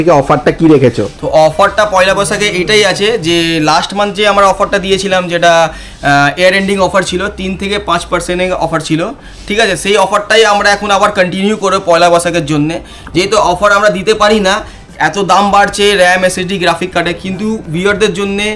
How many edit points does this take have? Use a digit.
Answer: 0